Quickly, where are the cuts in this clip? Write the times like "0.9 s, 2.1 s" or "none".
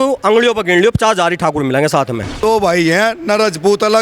2.4 s